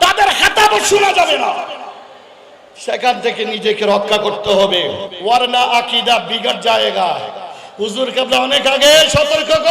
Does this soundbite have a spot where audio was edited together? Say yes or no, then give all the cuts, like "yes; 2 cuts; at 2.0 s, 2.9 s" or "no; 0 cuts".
yes; 1 cut; at 5.1 s